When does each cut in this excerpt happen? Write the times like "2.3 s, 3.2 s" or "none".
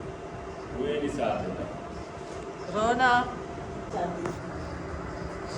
3.9 s